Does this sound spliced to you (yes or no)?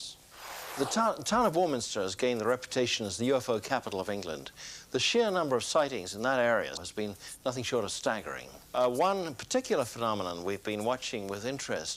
yes